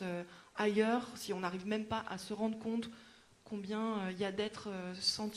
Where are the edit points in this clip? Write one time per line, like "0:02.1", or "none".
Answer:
none